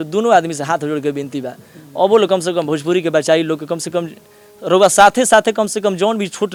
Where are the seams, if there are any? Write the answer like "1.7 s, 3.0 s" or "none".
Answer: none